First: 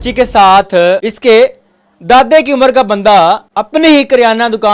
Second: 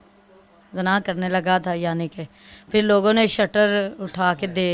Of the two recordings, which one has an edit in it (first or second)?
first